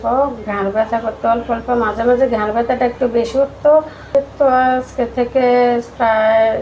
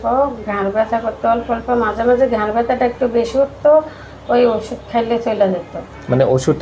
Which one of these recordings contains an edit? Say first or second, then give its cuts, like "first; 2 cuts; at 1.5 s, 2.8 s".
first; 1 cut; at 4.1 s